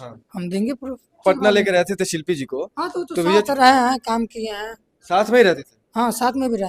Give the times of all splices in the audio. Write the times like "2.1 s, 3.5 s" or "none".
1.2 s

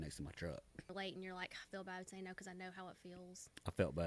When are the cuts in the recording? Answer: 0.9 s

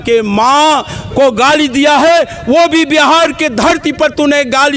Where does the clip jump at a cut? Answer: none

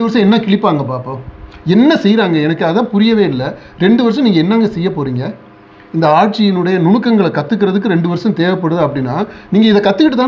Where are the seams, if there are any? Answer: none

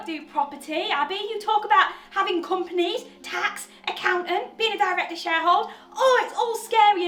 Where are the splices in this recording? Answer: none

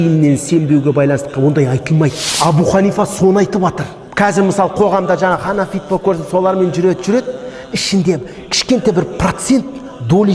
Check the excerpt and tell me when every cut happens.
2.2 s

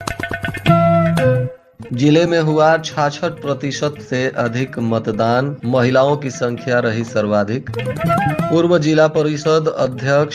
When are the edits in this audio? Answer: 1.6 s

